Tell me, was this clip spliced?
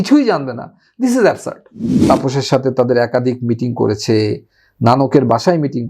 yes; 1 cut; at 1.9 s

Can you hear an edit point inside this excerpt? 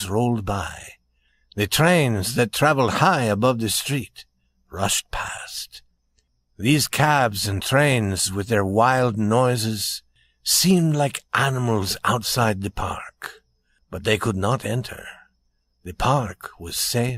no; 0 cuts

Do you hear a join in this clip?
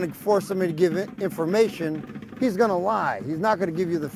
yes; 1 cut; at 1.3 s

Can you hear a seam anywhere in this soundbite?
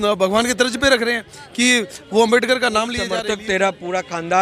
yes; 1 cut; at 3.2 s

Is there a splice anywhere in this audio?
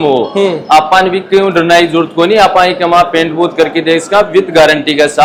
no; 0 cuts

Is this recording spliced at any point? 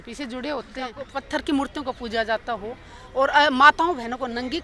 yes; 1 cut; at 1.1 s

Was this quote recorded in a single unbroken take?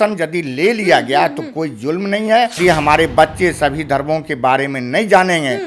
no; 1 cut; at 2.6 s

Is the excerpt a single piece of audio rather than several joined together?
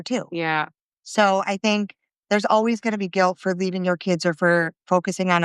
yes; 0 cuts

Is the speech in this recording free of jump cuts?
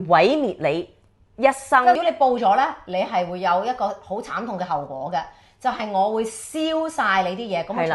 no; 1 cut; at 2.0 s

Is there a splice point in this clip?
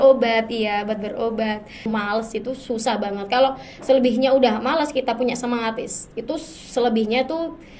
yes; 1 cut; at 1.9 s

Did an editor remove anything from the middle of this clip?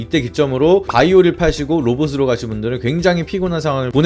no; 0 cuts

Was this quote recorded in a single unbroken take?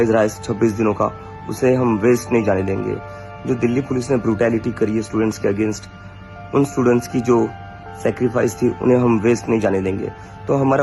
yes; 0 cuts

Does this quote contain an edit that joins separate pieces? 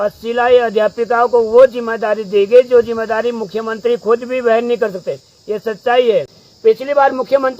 yes; 1 cut; at 6.4 s

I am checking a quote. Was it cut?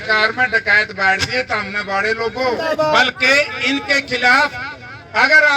yes; 1 cut; at 2.6 s

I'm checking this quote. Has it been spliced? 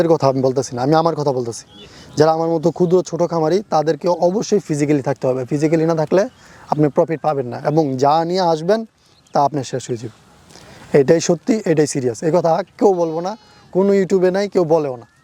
no; 0 cuts

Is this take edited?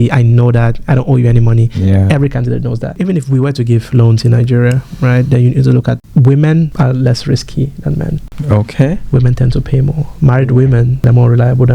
yes; 4 cuts; at 2.9 s, 6.7 s, 8.3 s, 11.0 s

